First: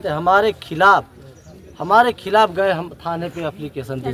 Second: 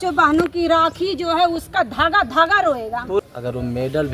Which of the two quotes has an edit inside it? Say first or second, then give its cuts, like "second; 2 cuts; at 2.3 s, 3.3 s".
second; 1 cut; at 3.2 s